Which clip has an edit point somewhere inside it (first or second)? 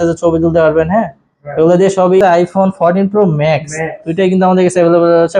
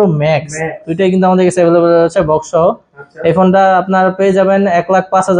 first